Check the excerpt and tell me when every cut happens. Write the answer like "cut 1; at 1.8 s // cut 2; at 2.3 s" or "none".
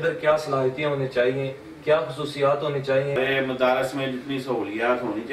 cut 1; at 3.2 s